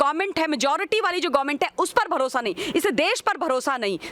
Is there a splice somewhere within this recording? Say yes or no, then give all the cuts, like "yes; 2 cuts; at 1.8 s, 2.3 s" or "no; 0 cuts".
no; 0 cuts